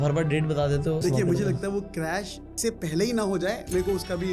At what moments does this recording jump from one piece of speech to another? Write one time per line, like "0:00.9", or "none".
0:01.0
0:02.5

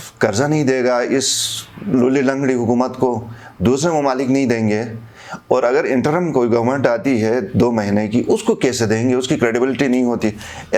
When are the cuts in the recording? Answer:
none

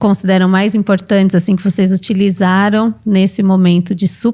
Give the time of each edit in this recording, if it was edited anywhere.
none

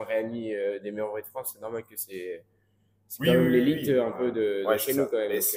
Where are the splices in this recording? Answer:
none

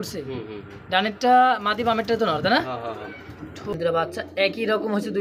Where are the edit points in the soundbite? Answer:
0:03.7

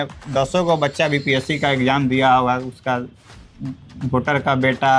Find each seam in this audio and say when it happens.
none

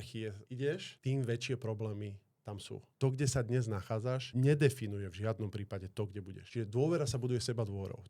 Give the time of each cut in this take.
0:00.9
0:02.9
0:04.3
0:06.4

